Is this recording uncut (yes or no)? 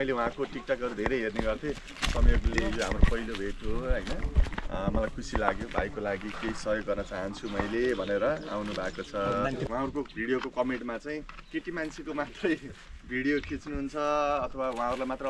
no